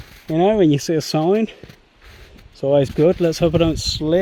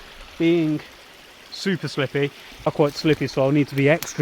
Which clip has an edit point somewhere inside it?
second; 1 cut; at 2.7 s

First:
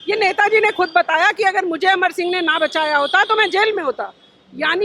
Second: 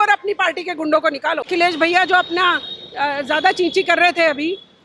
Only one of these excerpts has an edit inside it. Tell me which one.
second; 1 cut; at 1.5 s

